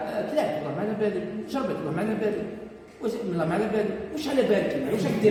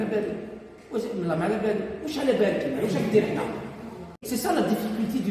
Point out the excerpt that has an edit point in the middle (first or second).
second